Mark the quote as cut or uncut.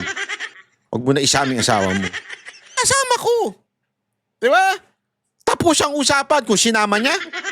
cut